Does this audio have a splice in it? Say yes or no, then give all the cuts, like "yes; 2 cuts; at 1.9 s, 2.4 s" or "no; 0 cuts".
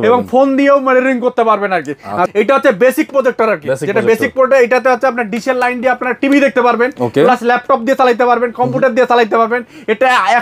yes; 1 cut; at 2.6 s